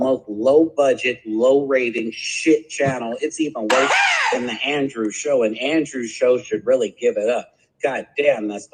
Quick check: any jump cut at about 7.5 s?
no; 0 cuts

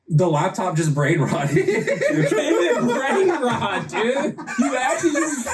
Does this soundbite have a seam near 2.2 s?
yes; 2 cuts; at 2.2 s, 4.5 s

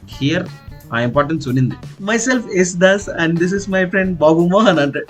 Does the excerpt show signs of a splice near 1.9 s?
yes; 1 cut; at 1.9 s

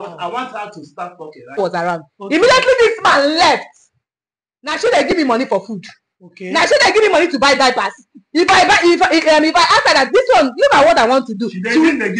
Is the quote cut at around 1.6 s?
yes; 1 cut; at 1.6 s

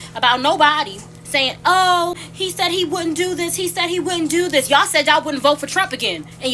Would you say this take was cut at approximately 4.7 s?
yes; 2 cuts; at 2.3 s, 4.7 s

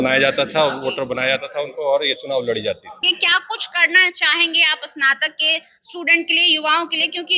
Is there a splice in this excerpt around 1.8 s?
no; 1 cut; at 3.1 s

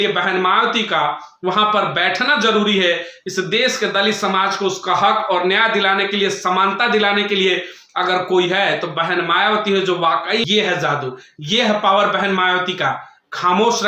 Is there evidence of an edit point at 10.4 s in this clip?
yes; 1 cut; at 10.4 s

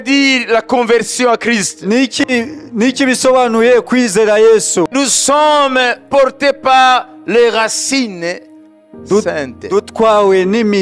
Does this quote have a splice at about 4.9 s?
yes; 1 cut; at 4.9 s

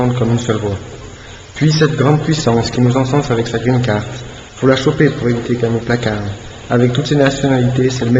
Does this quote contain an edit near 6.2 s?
yes; 1 cut; at 6.2 s

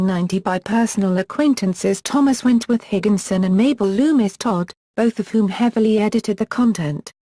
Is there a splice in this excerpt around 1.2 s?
no; 1 cut; at 3.9 s

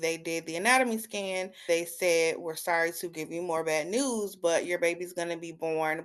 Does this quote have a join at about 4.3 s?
no; 1 cut; at 1.6 s

